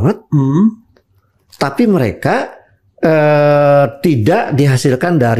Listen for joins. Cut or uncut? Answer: uncut